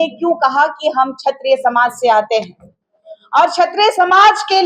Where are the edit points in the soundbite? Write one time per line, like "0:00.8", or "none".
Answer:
none